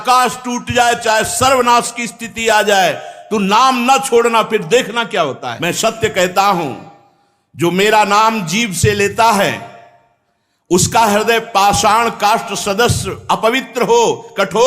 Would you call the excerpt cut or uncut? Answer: cut